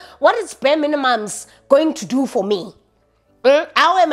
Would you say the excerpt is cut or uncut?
uncut